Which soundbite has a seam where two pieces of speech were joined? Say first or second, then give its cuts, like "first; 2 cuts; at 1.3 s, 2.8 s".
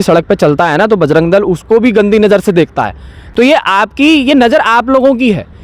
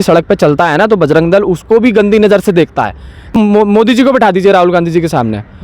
second; 1 cut; at 3.3 s